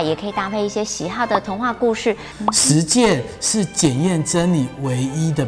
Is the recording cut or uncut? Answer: cut